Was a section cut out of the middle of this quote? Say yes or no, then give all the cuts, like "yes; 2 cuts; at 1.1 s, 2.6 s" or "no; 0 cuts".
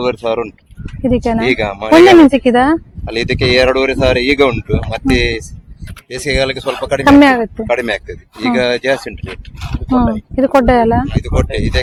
no; 0 cuts